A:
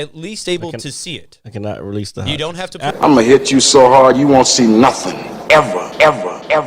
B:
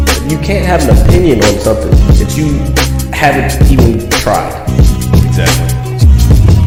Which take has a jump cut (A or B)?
A